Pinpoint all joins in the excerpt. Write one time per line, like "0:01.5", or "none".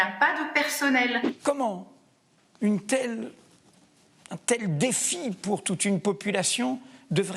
0:01.3